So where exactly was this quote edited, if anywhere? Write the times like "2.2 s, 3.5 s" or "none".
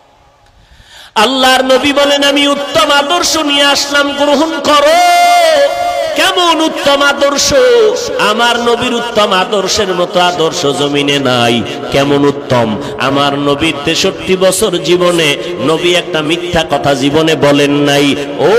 none